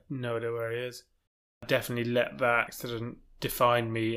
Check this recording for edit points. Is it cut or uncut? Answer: cut